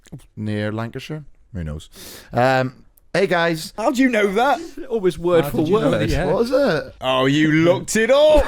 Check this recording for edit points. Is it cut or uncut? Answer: cut